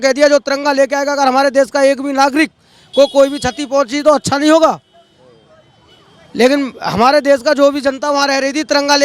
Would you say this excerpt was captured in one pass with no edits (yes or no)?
yes